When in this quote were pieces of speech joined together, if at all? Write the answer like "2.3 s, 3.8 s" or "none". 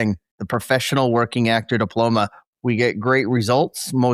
2.4 s